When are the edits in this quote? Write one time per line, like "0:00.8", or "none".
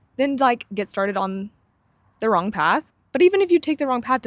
none